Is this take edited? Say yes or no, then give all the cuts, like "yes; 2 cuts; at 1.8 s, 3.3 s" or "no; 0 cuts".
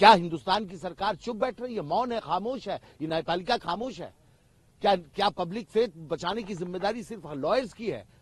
no; 0 cuts